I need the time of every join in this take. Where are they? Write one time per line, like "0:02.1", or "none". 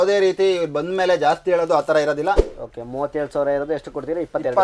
0:02.5